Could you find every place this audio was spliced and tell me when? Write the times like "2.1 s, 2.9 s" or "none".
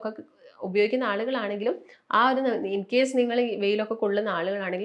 none

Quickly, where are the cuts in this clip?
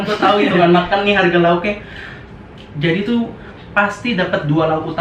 none

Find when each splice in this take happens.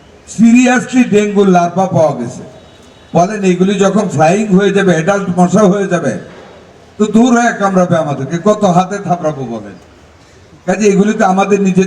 none

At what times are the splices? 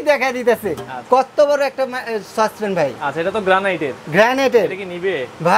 none

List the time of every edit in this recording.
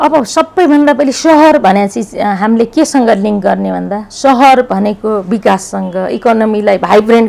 none

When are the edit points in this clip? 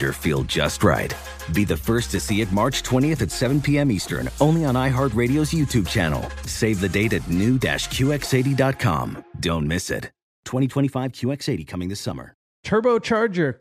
12.5 s

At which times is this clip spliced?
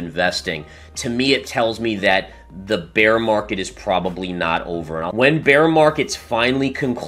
5.1 s

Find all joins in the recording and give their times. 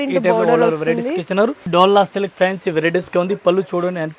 1.6 s

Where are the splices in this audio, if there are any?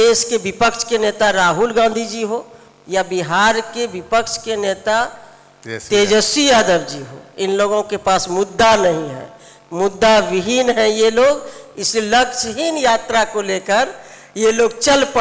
none

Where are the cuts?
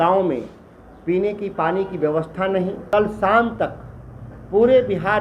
2.8 s

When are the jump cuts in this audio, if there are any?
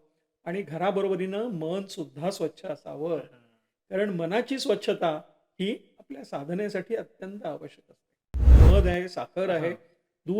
8.6 s

